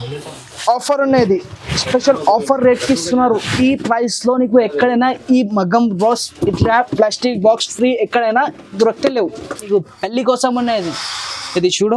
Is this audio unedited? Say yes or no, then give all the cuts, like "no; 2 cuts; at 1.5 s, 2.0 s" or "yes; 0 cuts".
no; 1 cut; at 9.7 s